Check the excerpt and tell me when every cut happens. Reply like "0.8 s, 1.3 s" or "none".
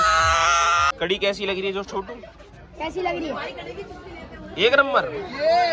0.9 s